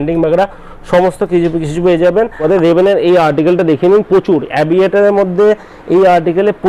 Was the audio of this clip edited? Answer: yes; 1 cut; at 2.4 s

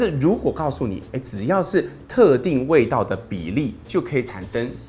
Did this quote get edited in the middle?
no; 0 cuts

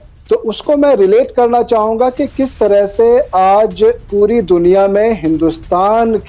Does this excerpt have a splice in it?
no; 0 cuts

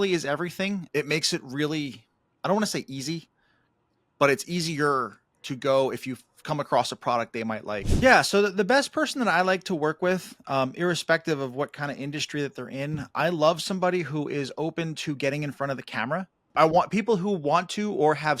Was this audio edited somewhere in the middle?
yes; 3 cuts; at 0.9 s, 7.9 s, 16.4 s

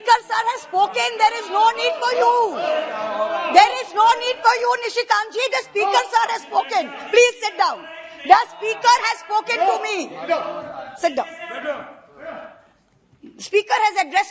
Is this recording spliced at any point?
no; 0 cuts

